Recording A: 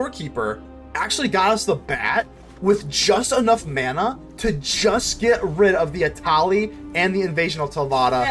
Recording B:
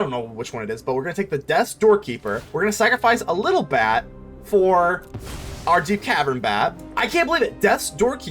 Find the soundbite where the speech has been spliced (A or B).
B